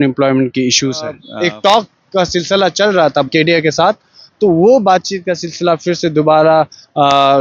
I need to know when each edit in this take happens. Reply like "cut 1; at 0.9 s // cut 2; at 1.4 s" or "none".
cut 1; at 1.2 s // cut 2; at 3.3 s